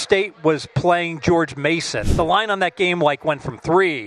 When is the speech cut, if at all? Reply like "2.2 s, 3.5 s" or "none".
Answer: 2.0 s